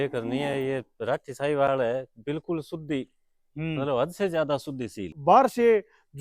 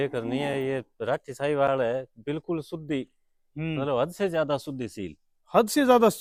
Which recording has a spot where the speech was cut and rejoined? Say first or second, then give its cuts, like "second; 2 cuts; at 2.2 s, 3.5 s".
first; 1 cut; at 5.1 s